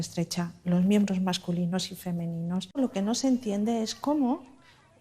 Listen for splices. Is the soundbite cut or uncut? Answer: cut